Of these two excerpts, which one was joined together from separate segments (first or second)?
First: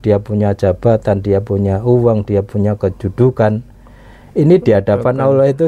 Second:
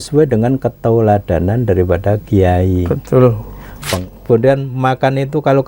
second